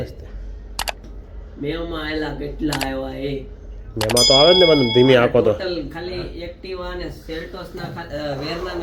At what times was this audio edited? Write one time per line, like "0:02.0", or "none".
none